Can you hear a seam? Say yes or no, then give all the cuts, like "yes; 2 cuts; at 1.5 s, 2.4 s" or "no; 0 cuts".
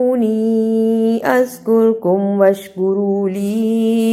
no; 0 cuts